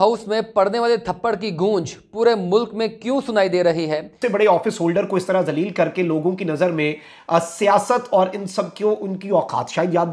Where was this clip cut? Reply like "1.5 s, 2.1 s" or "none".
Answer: 4.2 s